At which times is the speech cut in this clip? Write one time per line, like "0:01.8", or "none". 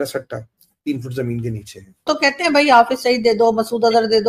0:02.1